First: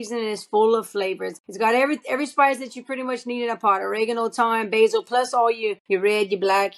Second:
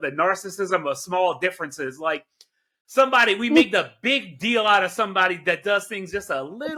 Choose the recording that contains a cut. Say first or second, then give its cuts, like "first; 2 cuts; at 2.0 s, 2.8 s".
first; 2 cuts; at 1.3 s, 5.8 s